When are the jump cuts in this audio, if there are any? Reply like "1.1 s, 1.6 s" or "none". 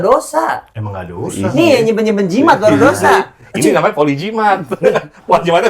none